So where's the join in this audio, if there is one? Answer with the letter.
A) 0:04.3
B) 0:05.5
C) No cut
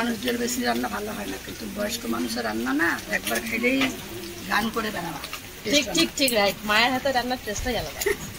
B